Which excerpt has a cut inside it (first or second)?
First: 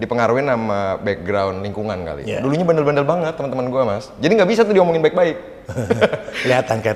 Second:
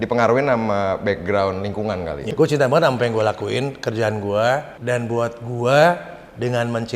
second